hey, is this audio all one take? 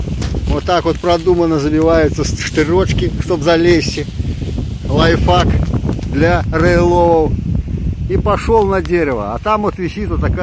yes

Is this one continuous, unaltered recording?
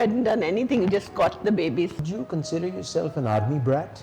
no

